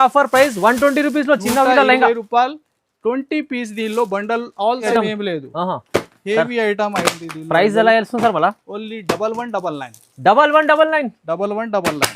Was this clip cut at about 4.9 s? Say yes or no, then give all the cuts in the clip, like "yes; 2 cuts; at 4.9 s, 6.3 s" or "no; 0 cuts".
yes; 1 cut; at 4.9 s